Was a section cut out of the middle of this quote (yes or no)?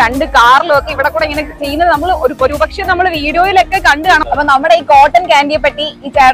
yes